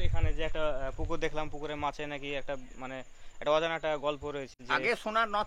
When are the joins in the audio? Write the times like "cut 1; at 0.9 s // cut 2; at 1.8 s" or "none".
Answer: cut 1; at 4.6 s